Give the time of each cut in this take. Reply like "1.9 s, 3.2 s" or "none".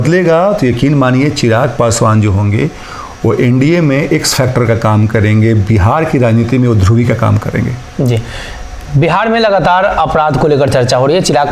none